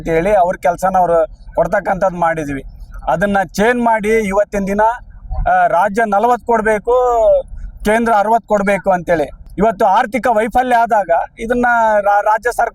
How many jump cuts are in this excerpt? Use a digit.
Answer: 1